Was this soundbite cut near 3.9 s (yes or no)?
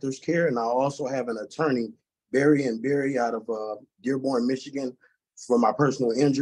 no